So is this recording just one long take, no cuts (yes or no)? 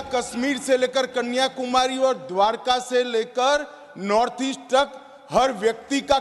yes